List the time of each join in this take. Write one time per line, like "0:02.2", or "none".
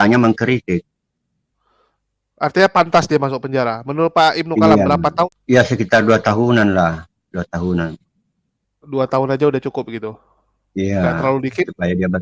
0:05.3

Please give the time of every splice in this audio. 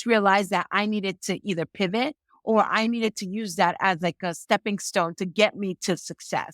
none

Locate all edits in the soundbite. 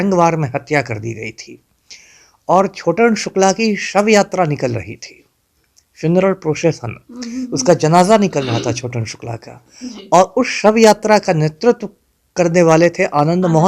none

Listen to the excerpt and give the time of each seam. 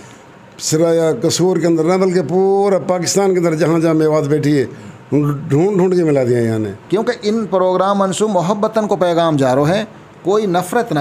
0:06.8

